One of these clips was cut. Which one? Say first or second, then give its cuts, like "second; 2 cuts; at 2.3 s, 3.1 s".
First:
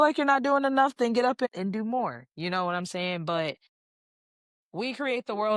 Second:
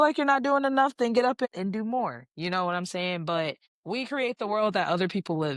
second; 1 cut; at 3.7 s